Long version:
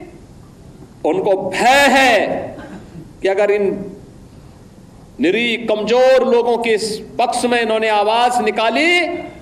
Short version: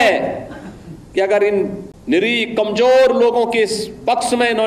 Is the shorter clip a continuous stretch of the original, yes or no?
no